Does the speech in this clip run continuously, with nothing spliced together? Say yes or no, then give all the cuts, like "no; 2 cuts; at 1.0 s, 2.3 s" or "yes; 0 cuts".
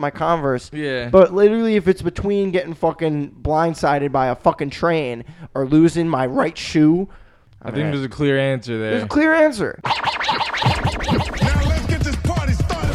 no; 1 cut; at 9.8 s